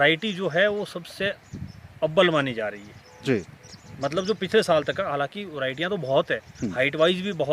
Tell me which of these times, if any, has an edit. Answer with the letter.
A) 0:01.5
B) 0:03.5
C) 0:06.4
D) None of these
D